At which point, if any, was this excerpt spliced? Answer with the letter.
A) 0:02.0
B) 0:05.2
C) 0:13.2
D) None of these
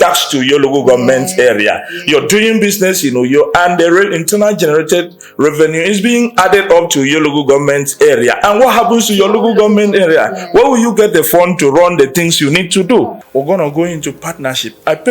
C